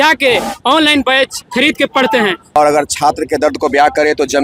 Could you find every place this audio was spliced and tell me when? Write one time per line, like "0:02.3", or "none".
0:02.6